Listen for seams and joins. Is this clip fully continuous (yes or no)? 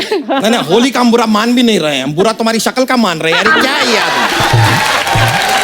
yes